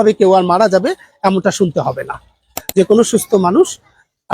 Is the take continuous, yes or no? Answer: no